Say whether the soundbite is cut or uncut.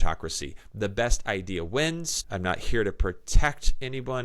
cut